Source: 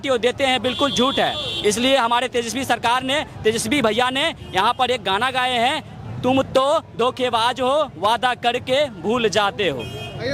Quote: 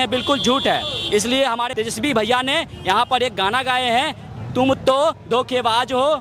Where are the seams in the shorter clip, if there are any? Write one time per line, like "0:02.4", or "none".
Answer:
0:01.7